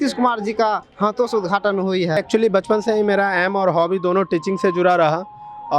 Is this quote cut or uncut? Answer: cut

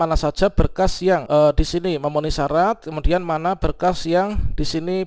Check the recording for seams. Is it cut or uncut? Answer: cut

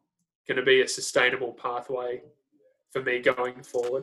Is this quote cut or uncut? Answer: uncut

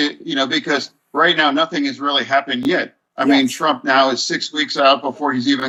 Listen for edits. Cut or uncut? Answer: uncut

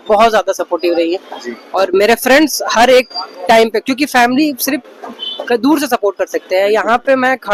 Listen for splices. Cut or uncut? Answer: uncut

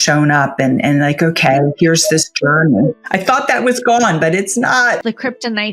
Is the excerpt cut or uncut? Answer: cut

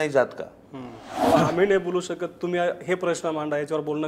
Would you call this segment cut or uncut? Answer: cut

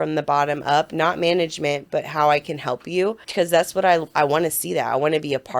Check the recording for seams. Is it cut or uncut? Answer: cut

